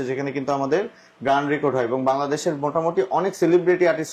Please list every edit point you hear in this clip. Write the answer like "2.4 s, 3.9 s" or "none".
none